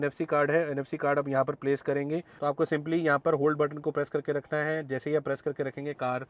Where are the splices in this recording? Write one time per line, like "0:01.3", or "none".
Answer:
0:02.3